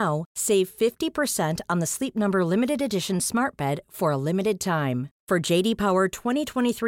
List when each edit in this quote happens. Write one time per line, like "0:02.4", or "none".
none